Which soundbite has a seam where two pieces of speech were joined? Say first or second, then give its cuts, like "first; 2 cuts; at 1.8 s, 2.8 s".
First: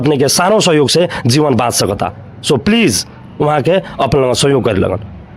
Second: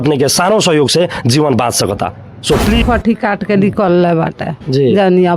second; 1 cut; at 2.8 s